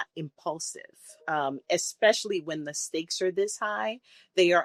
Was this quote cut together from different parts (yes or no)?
no